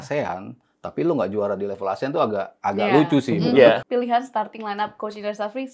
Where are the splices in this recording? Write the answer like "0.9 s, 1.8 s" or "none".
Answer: 3.8 s